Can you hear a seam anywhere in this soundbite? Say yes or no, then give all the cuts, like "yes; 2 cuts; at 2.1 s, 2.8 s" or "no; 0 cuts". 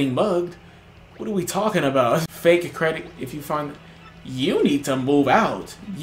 yes; 1 cut; at 2.3 s